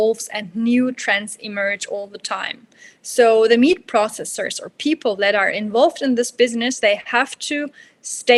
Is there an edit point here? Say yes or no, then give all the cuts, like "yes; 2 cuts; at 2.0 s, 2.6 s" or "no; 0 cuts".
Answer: no; 0 cuts